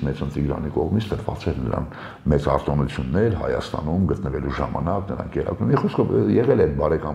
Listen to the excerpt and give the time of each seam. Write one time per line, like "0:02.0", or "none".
none